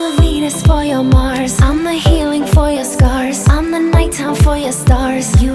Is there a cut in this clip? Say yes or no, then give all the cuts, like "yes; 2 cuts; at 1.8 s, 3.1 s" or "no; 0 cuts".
no; 0 cuts